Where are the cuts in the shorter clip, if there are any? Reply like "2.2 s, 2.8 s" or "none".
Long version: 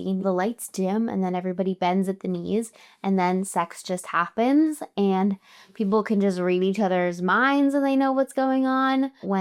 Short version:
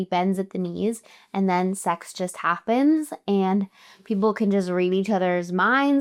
none